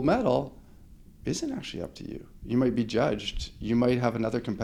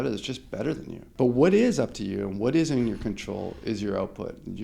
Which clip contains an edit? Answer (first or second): second